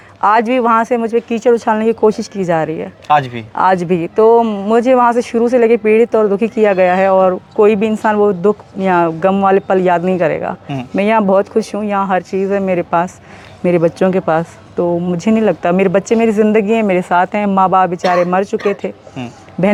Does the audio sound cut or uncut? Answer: uncut